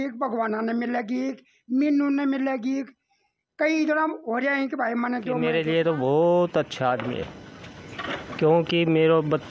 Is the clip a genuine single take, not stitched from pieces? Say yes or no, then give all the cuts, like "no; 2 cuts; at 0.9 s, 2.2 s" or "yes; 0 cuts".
no; 1 cut; at 5.5 s